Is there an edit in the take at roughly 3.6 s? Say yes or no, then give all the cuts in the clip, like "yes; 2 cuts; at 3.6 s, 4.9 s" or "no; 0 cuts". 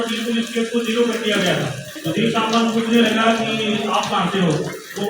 no; 1 cut; at 1.9 s